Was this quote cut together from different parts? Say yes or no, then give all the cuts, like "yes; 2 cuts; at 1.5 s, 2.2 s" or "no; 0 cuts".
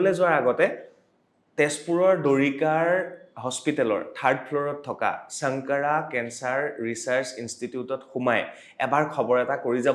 no; 0 cuts